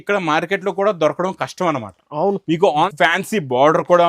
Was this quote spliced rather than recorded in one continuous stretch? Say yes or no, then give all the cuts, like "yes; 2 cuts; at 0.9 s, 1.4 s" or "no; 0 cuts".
yes; 1 cut; at 2.9 s